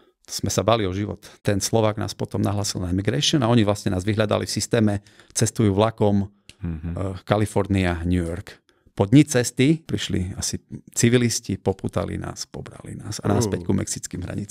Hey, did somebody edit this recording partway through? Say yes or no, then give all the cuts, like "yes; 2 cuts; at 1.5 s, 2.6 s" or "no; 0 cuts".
yes; 2 cuts; at 1.4 s, 9.8 s